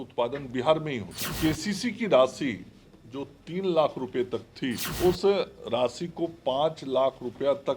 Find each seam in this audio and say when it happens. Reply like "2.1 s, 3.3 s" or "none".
1.2 s, 4.9 s